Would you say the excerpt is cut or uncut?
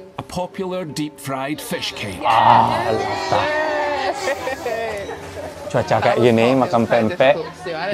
uncut